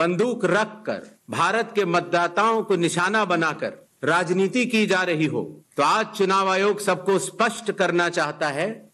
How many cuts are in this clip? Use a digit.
0